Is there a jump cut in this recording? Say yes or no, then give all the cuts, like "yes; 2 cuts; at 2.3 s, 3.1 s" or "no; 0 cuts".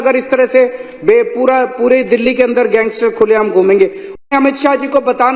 yes; 1 cut; at 4.2 s